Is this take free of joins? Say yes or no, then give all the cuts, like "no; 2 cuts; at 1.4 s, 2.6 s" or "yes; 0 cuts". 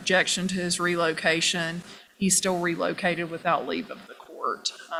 yes; 0 cuts